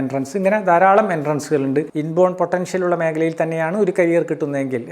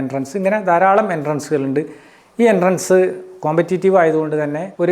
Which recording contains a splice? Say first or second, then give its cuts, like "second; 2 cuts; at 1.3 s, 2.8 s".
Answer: first; 1 cut; at 2.0 s